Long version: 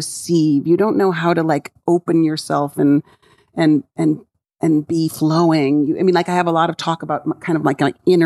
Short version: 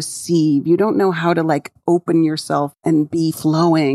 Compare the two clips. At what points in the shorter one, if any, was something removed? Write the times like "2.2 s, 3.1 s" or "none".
2.7 s